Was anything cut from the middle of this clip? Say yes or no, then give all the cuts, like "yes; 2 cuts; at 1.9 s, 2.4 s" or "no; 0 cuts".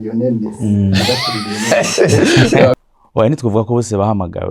yes; 1 cut; at 2.7 s